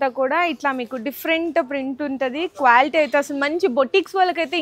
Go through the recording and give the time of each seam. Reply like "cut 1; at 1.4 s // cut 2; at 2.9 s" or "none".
none

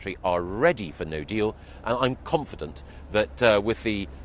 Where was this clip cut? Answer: none

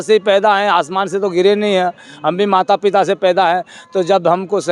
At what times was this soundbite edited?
none

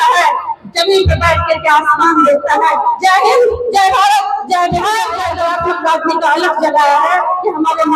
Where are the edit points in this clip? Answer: cut 1; at 5.4 s

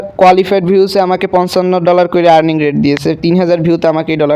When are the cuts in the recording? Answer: none

